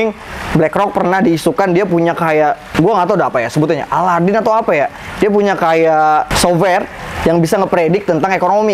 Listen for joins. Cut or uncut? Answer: cut